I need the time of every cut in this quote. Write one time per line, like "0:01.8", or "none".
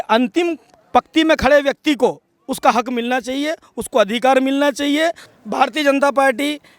0:05.3